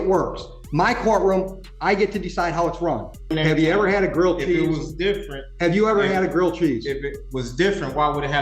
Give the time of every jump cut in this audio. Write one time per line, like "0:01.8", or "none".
0:03.3

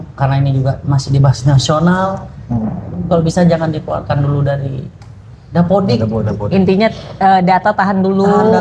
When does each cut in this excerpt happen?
none

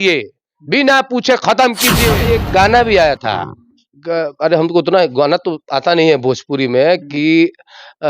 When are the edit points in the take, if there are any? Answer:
0:02.2

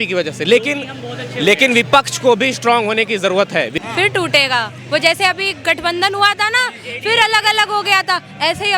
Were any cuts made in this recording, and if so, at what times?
0:03.8

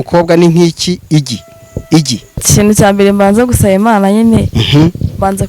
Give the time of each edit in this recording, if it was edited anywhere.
0:02.4

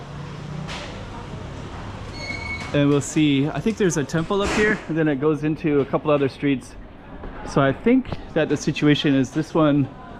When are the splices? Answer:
none

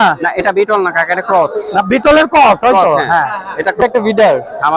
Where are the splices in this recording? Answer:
0:03.8

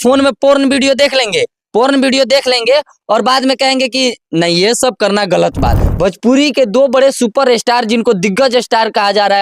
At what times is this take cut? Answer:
0:05.9

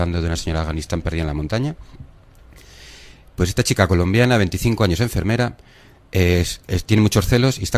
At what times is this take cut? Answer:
0:05.4

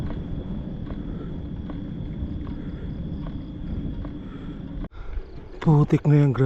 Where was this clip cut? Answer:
0:04.9

